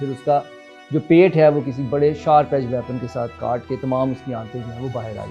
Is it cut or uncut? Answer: uncut